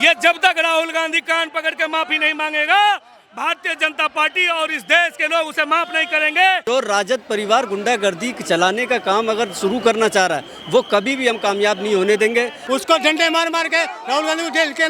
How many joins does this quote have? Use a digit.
2